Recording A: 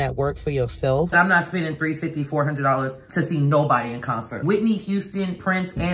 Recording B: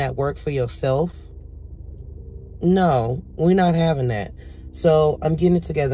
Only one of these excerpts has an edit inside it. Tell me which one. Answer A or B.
A